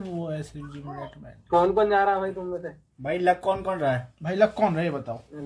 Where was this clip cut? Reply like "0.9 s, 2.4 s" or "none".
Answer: none